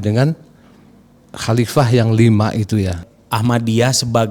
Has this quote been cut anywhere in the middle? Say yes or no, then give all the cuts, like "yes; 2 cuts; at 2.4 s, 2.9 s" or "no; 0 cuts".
yes; 1 cut; at 3.0 s